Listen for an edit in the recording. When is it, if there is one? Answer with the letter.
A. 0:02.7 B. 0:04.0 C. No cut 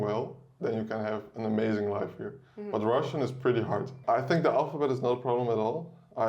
B